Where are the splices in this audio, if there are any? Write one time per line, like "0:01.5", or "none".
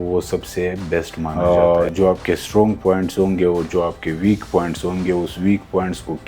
0:01.3